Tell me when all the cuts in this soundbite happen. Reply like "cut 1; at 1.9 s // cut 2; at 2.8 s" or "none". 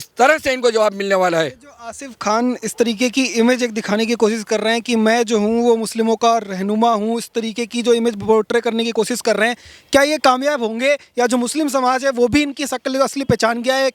none